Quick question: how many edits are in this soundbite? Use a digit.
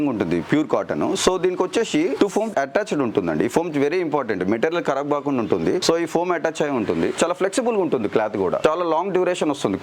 0